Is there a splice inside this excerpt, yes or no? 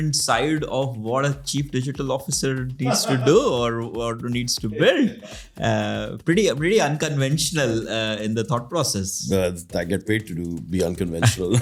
no